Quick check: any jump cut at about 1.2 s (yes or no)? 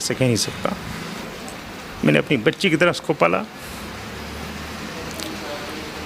yes